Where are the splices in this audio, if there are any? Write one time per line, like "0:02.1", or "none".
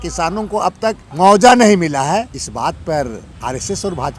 0:01.0
0:02.4
0:03.3